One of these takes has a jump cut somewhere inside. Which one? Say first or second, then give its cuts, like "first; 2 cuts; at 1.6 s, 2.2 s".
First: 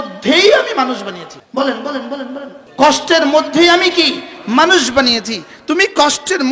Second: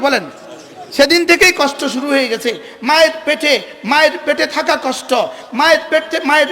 first; 2 cuts; at 1.3 s, 2.6 s